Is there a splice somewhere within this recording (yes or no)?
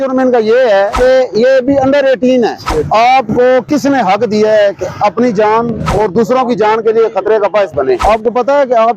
yes